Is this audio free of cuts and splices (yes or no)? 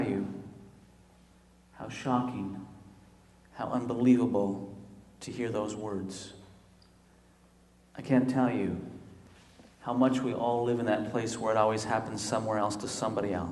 no